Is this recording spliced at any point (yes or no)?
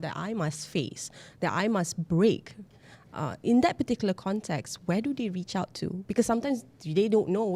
no